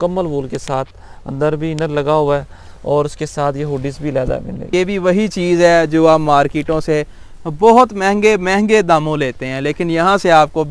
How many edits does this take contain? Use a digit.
1